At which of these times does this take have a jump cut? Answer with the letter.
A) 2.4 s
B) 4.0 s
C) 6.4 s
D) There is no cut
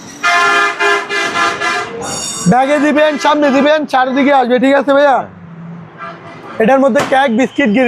C